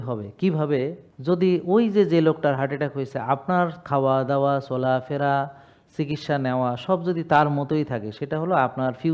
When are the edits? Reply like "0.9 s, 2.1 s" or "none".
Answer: 1.1 s